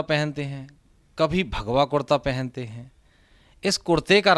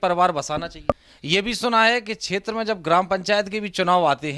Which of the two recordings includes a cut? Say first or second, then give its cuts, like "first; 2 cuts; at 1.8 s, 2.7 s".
second; 1 cut; at 1.1 s